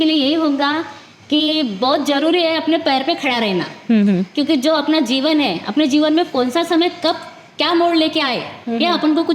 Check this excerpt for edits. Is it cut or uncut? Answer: uncut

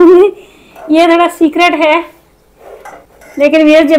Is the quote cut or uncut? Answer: cut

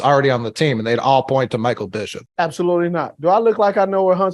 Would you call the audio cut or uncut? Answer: cut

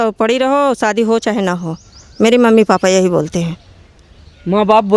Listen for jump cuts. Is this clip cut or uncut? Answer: uncut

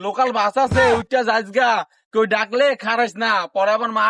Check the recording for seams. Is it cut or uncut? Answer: uncut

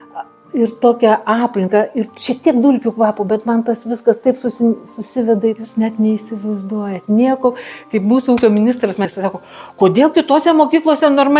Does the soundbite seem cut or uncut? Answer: cut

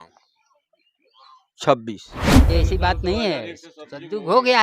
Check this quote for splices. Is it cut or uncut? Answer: cut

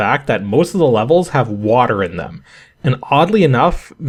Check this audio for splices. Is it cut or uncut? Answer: uncut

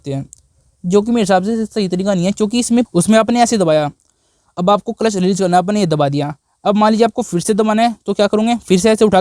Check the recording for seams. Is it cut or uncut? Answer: cut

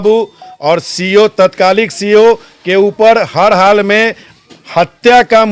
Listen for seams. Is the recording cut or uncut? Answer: uncut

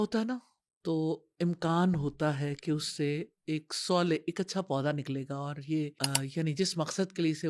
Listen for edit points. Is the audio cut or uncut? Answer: cut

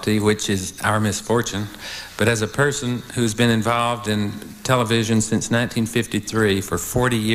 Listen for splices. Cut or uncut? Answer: uncut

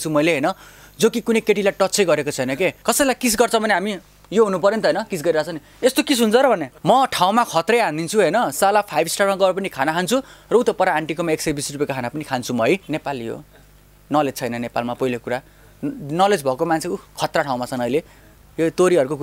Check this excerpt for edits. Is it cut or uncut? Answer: cut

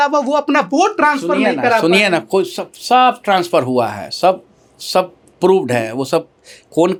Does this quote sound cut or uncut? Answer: uncut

